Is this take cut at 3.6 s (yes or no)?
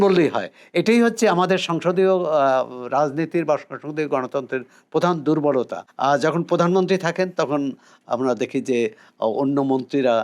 no